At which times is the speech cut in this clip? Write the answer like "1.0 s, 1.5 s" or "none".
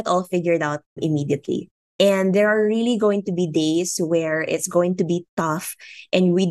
0.9 s